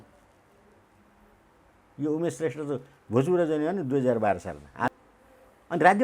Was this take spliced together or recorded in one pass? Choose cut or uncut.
cut